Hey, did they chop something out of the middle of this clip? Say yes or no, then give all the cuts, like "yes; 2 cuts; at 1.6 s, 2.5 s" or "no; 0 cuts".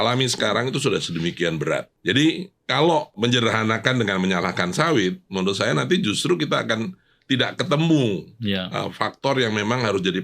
yes; 2 cuts; at 1.9 s, 3.1 s